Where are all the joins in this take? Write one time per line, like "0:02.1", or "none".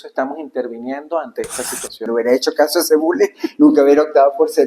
0:02.1